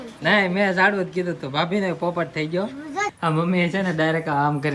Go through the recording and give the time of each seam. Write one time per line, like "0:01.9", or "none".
0:03.1